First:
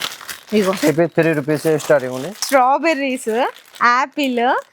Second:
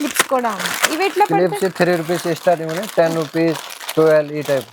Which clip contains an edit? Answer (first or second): first